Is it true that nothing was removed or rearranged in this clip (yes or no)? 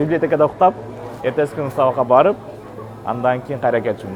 yes